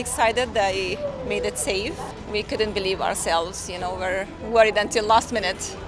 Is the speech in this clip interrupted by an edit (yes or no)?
no